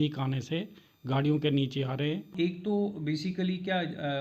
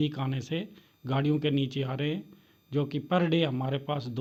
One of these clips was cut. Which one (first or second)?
first